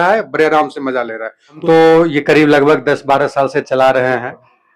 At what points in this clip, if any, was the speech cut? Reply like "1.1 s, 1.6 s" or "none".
1.6 s